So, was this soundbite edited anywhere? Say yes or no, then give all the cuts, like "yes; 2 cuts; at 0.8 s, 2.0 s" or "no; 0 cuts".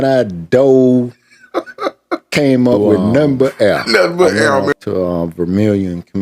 yes; 1 cut; at 4.7 s